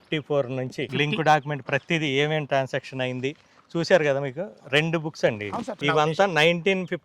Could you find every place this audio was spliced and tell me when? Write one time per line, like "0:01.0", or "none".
0:00.9
0:05.8